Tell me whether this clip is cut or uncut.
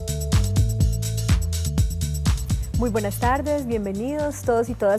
uncut